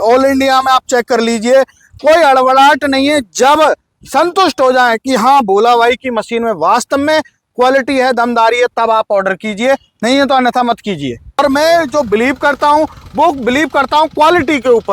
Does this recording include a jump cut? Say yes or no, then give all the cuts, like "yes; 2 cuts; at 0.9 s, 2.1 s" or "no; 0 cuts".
yes; 1 cut; at 11.4 s